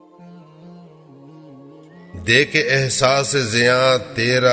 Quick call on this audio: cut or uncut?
cut